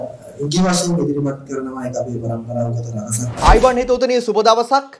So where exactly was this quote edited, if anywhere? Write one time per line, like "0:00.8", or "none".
0:03.3